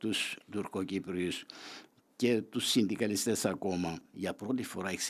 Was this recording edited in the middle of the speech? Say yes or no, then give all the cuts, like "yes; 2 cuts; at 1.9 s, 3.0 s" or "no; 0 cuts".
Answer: yes; 1 cut; at 4.1 s